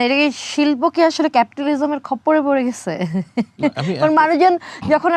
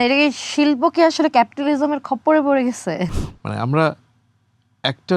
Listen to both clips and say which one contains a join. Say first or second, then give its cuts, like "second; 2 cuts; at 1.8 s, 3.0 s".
second; 1 cut; at 3.1 s